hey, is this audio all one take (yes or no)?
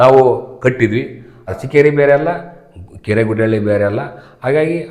no